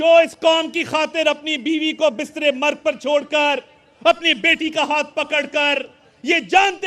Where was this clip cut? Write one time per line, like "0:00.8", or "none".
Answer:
none